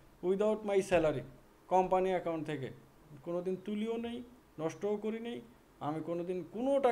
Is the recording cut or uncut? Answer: uncut